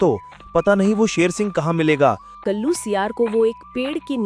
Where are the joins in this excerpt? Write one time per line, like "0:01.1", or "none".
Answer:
0:02.4